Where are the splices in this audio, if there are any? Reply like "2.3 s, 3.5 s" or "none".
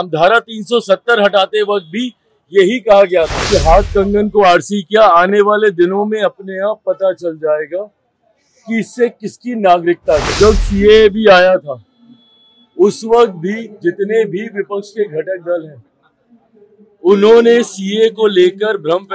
3.4 s, 10.3 s

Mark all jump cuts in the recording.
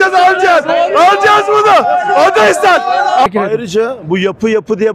3.3 s

